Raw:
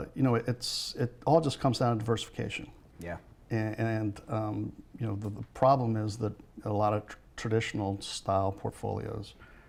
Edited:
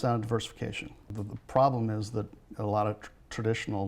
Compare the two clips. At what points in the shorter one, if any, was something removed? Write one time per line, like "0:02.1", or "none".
0:01.1